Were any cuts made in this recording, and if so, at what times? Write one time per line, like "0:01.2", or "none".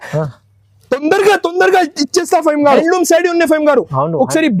0:02.8